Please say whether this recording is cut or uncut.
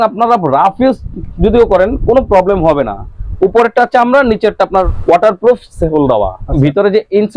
cut